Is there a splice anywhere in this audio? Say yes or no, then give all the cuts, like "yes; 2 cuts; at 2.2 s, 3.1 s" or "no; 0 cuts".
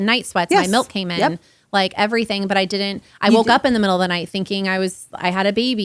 no; 0 cuts